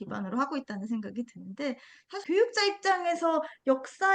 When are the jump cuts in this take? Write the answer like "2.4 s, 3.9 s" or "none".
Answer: 2.1 s